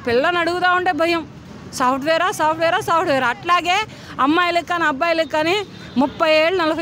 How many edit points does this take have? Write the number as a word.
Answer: zero